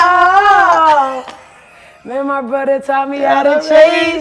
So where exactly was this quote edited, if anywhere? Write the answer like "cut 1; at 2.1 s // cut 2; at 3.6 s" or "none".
none